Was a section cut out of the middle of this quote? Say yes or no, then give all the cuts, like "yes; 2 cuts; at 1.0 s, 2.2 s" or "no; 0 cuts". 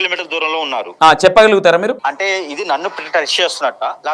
yes; 2 cuts; at 0.9 s, 2.0 s